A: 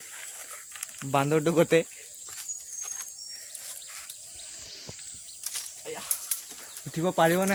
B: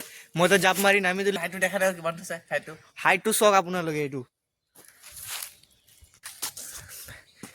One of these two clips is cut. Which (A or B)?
B